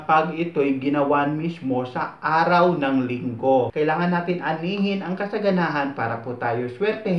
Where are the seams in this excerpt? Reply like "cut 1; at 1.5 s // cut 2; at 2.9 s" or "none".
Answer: cut 1; at 3.7 s